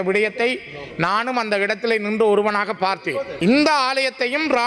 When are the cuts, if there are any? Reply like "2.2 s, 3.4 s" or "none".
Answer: 3.3 s